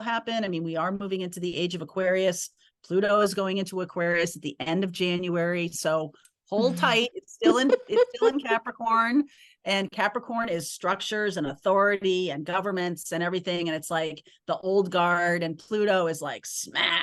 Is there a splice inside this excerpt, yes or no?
no